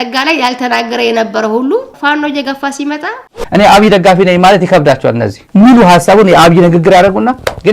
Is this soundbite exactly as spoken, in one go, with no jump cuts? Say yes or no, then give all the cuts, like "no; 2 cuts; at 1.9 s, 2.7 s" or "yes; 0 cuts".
no; 1 cut; at 3.3 s